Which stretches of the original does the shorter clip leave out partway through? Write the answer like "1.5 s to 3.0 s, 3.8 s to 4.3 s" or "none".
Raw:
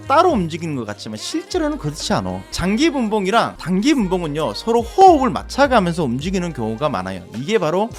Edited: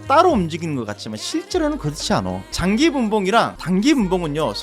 none